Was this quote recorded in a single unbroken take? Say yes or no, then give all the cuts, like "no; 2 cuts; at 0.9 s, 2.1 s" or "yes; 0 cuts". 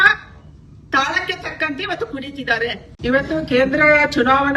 yes; 0 cuts